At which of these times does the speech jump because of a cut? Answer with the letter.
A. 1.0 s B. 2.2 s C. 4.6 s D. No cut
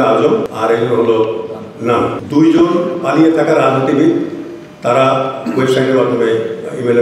B